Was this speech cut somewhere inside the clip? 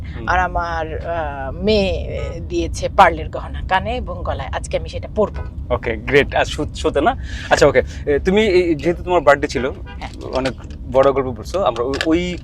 no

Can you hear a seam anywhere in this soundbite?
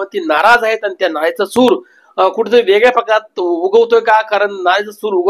no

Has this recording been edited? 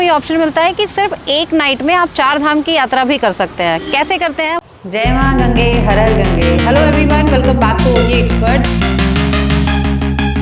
yes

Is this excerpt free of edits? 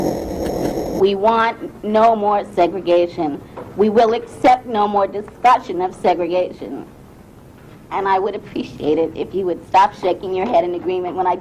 no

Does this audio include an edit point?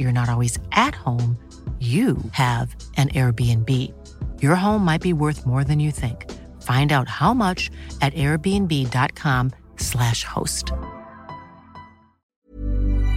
yes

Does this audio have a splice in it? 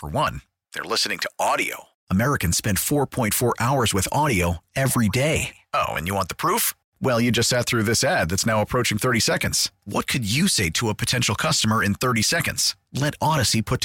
no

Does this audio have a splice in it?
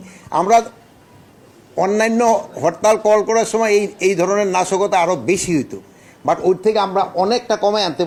no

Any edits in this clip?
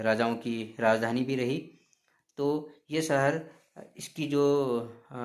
no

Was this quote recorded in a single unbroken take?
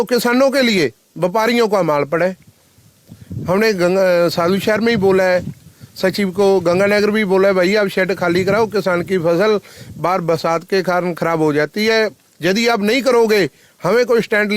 yes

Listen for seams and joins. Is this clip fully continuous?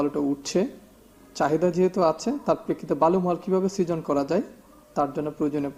yes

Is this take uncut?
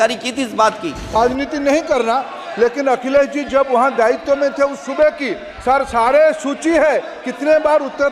no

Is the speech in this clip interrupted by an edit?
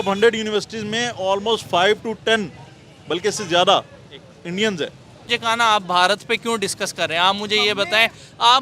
yes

